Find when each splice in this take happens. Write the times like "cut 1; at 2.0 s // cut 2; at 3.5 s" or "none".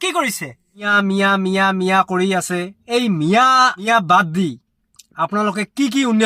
cut 1; at 0.9 s // cut 2; at 2.8 s // cut 3; at 3.9 s